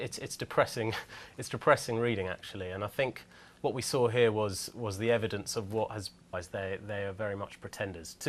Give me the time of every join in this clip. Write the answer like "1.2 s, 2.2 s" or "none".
none